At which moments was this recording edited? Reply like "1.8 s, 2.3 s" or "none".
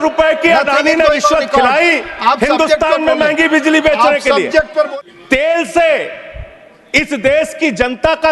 4.9 s